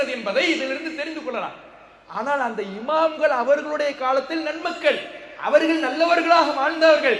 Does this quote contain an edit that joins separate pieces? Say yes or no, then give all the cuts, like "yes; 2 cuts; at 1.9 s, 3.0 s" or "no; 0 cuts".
no; 0 cuts